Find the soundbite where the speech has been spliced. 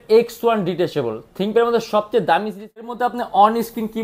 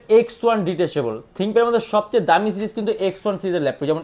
first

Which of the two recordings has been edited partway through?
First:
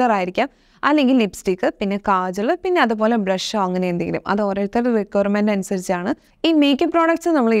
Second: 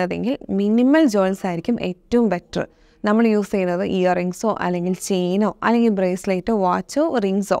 first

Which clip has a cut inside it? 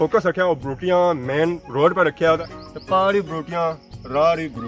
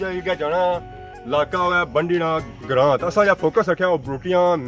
first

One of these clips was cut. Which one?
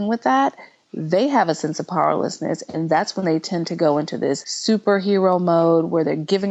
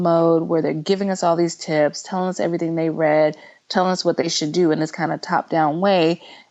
first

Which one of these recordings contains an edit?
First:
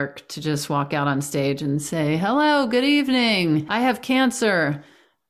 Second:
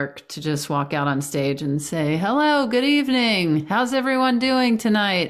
first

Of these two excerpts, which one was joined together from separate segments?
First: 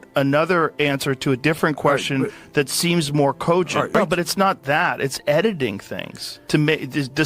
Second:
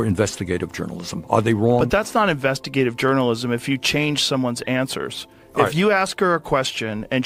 first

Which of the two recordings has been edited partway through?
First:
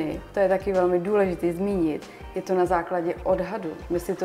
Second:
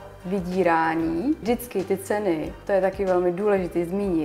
second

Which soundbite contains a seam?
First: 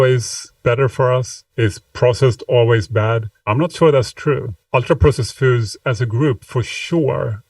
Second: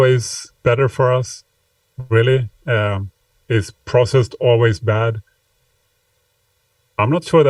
first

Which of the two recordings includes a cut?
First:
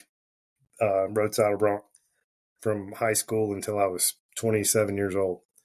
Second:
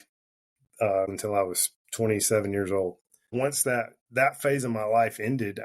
second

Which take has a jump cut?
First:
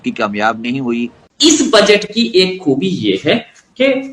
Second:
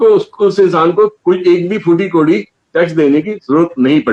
first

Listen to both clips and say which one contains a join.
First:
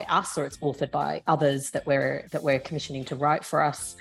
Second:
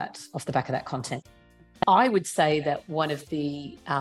second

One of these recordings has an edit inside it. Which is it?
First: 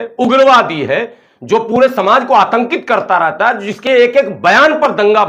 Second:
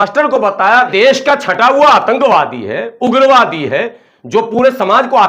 second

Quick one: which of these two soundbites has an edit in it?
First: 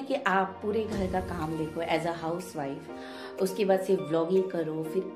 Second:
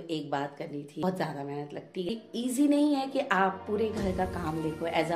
second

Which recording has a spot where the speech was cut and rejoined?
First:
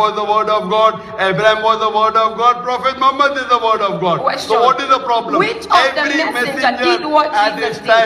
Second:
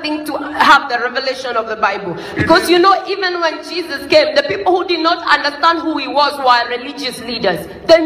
first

